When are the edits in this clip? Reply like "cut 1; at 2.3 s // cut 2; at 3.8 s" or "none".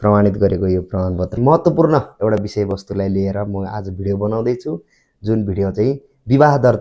cut 1; at 1.4 s